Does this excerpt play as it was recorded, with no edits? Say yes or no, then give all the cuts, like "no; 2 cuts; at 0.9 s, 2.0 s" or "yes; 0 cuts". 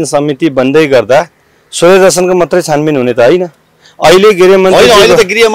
yes; 0 cuts